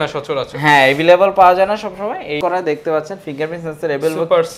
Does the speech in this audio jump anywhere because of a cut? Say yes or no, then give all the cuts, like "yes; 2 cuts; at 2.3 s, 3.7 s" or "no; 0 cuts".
yes; 1 cut; at 2.4 s